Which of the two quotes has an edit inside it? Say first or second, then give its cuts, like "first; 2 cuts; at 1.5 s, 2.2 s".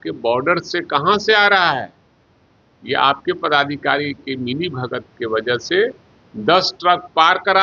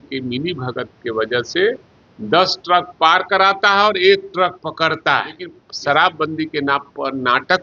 second; 1 cut; at 5.6 s